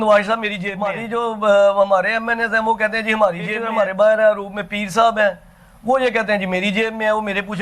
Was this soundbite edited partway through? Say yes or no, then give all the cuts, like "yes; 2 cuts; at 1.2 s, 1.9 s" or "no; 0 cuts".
yes; 2 cuts; at 1.0 s, 3.6 s